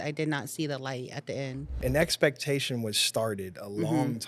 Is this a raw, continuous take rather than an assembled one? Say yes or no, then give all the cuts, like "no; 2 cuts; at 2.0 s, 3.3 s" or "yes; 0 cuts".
no; 1 cut; at 1.6 s